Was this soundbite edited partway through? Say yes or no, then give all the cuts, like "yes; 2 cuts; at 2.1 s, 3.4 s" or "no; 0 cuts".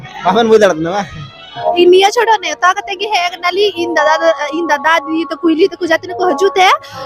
yes; 1 cut; at 1.6 s